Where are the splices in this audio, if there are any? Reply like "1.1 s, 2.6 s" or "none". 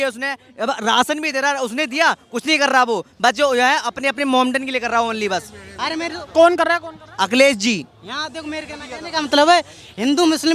none